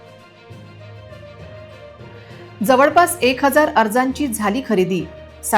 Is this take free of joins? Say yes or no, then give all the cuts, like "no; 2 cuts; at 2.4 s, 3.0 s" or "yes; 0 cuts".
no; 1 cut; at 1.6 s